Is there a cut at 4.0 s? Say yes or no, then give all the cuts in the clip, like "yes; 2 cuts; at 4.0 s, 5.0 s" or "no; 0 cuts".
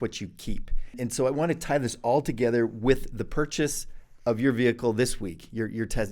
no; 1 cut; at 1.0 s